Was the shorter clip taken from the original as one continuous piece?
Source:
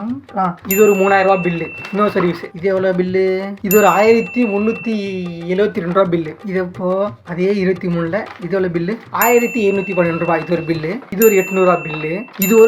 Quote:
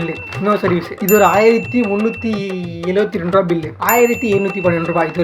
no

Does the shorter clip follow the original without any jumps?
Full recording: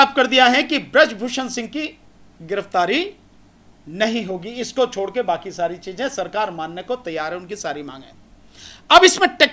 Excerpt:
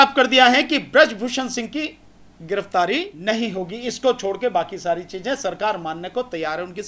no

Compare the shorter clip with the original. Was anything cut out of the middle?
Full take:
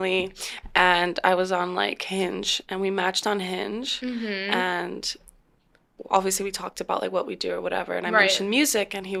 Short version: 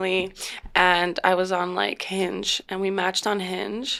no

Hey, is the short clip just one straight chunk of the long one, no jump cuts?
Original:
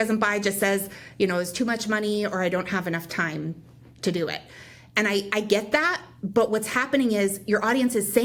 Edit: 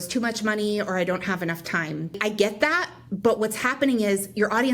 no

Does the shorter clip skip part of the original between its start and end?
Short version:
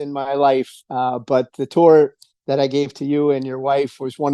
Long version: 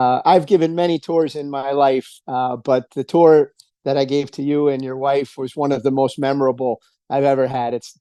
no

